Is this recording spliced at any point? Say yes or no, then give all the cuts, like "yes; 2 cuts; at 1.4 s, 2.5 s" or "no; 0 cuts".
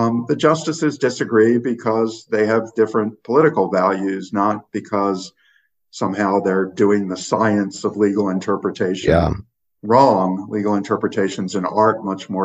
no; 0 cuts